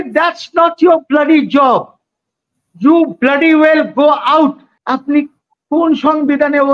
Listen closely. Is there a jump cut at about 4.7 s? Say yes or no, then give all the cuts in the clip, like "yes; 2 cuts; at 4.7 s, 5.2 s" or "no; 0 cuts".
yes; 1 cut; at 4.7 s